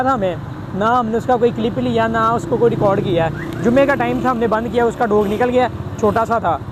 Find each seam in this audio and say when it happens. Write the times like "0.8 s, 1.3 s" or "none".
none